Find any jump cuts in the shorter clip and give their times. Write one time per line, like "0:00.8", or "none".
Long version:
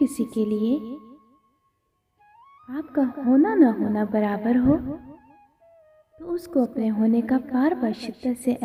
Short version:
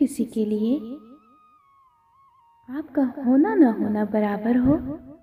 none